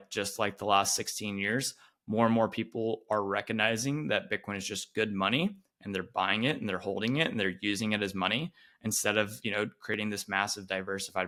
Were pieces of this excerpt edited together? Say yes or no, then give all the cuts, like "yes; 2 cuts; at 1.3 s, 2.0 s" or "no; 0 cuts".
no; 0 cuts